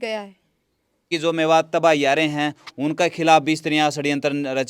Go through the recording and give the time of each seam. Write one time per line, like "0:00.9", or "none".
0:01.1